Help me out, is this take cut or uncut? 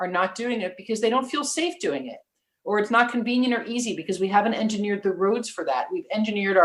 uncut